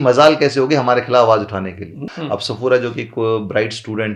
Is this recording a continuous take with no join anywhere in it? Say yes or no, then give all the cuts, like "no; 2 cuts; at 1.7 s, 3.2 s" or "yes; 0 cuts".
no; 1 cut; at 2.1 s